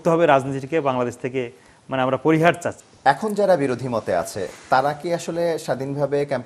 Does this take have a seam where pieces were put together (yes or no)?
yes